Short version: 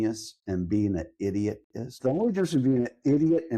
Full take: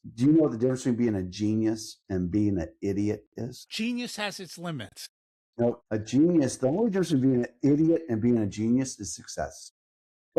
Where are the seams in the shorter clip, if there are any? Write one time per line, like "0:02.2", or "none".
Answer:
0:02.0